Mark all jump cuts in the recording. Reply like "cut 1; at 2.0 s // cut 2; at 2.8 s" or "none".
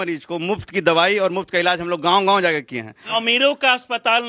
cut 1; at 3.1 s